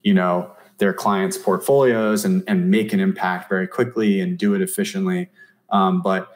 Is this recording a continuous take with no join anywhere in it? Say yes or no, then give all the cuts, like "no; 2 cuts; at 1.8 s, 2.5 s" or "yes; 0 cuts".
yes; 0 cuts